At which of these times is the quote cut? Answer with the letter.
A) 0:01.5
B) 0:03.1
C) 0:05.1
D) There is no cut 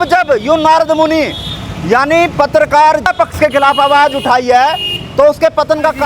B